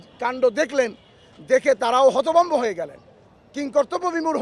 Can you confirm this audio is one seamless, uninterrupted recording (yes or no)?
yes